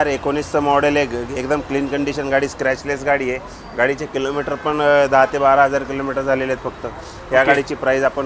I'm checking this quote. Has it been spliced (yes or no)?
no